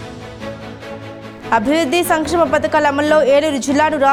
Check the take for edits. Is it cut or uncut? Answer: uncut